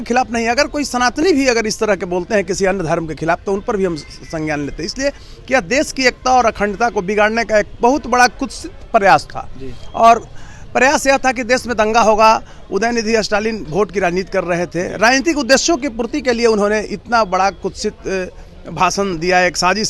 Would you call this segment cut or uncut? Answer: uncut